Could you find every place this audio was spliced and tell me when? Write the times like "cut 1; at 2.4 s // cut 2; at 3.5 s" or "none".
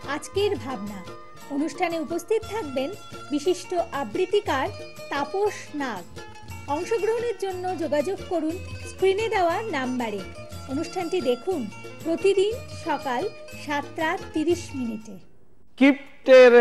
cut 1; at 15.5 s